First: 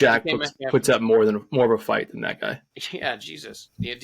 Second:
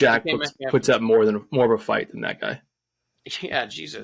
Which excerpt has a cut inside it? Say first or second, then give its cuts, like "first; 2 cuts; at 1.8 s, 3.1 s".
first; 1 cut; at 2.7 s